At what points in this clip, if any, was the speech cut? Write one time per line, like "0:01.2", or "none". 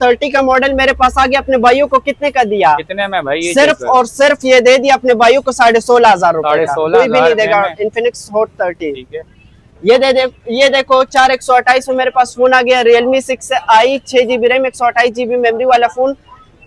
none